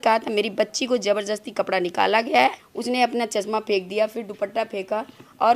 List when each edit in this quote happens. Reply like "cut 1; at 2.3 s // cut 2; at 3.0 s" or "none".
cut 1; at 2.7 s